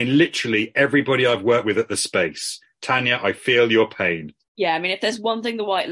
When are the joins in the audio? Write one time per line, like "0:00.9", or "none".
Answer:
0:04.4